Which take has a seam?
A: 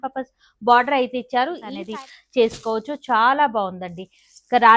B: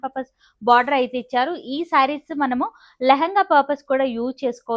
A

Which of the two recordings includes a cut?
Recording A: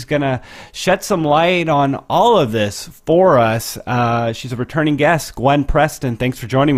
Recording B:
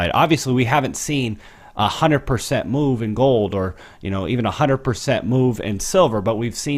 B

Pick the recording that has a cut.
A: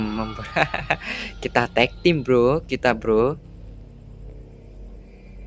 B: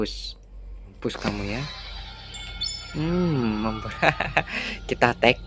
B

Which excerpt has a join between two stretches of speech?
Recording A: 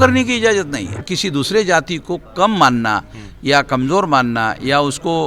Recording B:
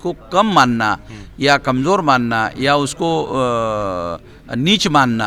A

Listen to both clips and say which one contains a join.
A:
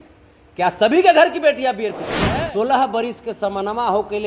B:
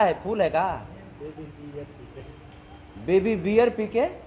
A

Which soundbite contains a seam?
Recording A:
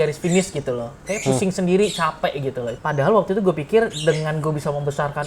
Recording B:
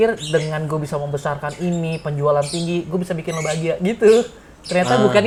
A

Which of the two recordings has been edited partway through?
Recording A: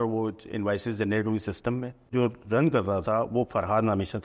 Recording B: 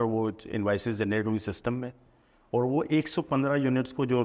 A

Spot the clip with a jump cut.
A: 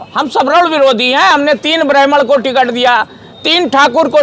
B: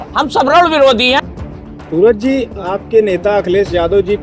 B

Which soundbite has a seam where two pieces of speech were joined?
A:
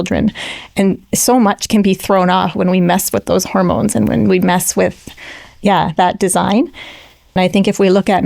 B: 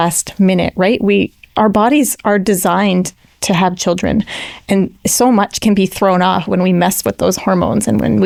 A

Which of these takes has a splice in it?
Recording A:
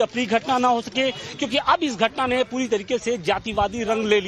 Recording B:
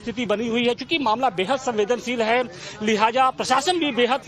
B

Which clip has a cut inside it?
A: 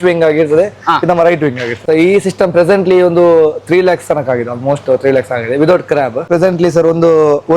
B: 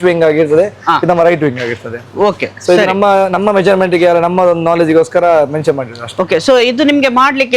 A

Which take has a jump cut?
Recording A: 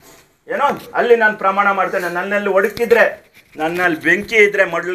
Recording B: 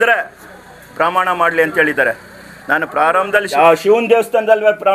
B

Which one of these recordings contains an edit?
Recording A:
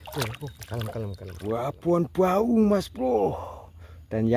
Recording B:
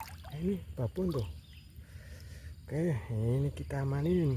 A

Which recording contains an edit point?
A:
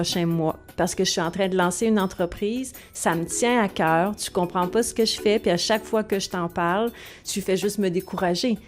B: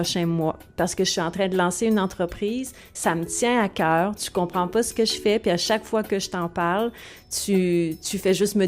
A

